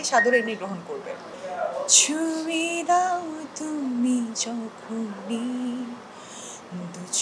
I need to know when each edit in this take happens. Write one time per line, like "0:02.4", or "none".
0:01.4